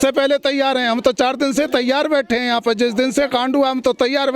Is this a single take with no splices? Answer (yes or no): yes